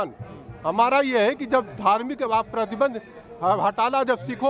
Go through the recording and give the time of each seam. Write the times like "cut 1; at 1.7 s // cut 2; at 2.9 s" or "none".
none